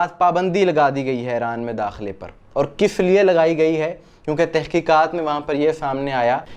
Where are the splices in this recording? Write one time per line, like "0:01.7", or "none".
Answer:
none